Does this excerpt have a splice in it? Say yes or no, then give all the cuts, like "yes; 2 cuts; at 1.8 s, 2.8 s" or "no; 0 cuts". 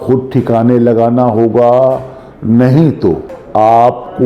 yes; 1 cut; at 3.3 s